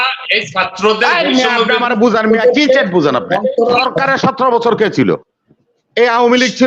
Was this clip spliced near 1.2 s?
no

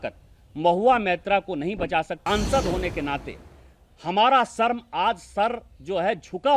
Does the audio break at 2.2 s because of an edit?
yes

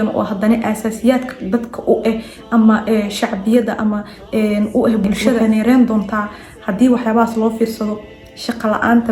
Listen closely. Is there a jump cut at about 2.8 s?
no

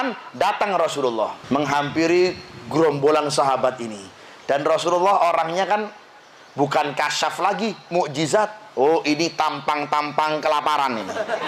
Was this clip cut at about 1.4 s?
yes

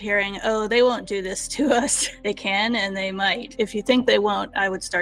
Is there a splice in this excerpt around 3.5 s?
yes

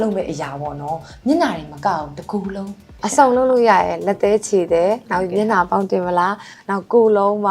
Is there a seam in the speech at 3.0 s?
yes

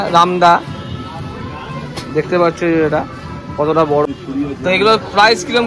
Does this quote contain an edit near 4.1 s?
yes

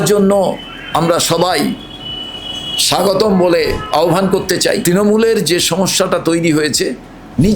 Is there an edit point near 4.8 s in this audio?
yes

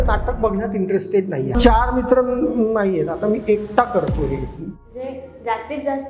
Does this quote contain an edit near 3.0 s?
no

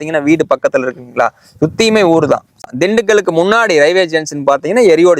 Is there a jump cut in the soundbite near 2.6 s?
yes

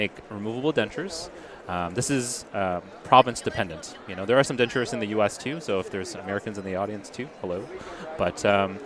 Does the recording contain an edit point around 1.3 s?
no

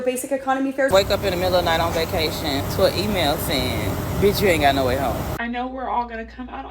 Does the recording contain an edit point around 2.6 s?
yes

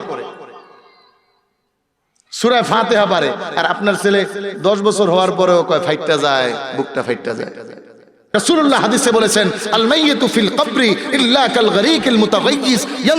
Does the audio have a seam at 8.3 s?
yes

